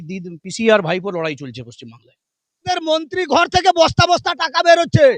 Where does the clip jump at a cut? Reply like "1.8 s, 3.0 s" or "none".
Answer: 2.8 s